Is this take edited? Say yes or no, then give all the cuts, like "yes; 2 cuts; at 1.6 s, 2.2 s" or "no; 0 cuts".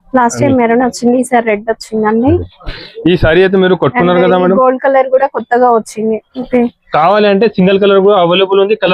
yes; 1 cut; at 6.4 s